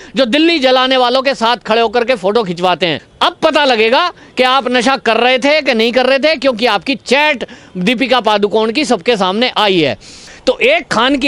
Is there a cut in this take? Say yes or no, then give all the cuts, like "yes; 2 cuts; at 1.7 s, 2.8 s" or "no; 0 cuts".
yes; 2 cuts; at 3.1 s, 10.2 s